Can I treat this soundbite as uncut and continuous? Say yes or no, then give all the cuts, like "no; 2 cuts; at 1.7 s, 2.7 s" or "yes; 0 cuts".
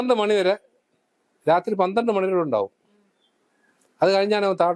yes; 0 cuts